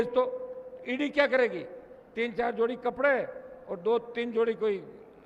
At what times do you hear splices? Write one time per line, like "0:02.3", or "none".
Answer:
none

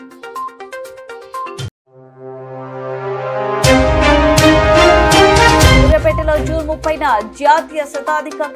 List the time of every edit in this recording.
0:05.7

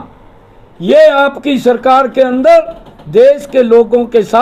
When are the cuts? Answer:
none

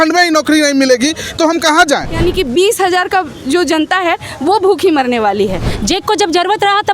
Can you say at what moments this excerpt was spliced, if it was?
0:02.1
0:05.7

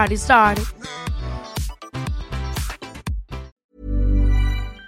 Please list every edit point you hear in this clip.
0:03.6

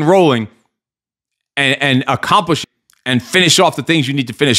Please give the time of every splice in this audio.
0:02.7

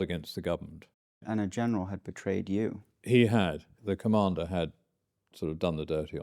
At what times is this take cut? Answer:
0:01.2
0:03.7

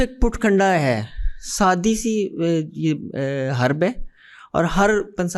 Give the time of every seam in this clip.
none

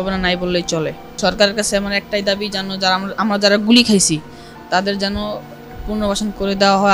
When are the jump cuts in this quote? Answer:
0:01.1

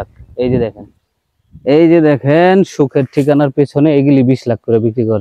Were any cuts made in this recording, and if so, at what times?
none

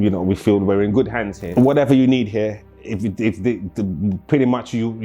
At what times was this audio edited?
0:01.4

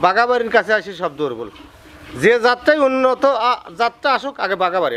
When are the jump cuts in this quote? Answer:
none

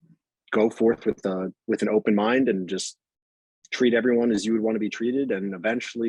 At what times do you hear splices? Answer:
none

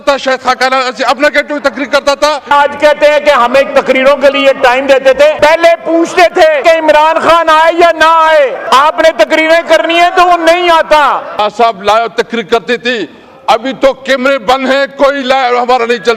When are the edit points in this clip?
0:02.5
0:05.4
0:06.6
0:08.6
0:11.4

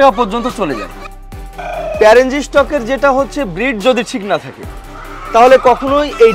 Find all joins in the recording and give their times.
0:01.0

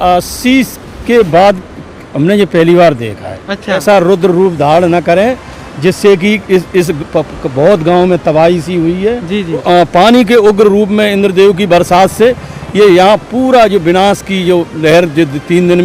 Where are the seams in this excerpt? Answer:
0:03.8
0:09.6

